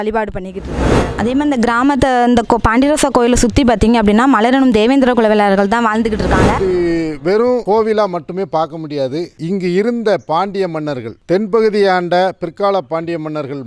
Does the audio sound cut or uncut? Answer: cut